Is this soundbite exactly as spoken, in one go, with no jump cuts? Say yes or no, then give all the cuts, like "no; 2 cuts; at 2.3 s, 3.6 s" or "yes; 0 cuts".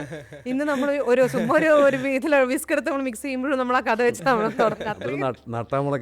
yes; 0 cuts